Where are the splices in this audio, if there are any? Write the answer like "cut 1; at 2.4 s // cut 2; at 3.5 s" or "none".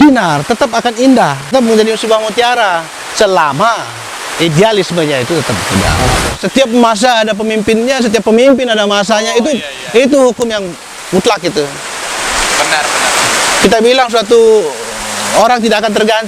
cut 1; at 1.5 s // cut 2; at 6.4 s